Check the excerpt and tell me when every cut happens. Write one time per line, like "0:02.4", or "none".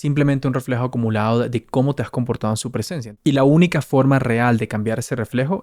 0:03.0